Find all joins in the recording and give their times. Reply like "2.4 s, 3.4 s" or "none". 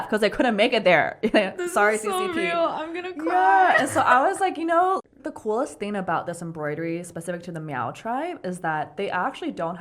5.0 s